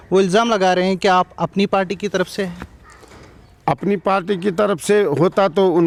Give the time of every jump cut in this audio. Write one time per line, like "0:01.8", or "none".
none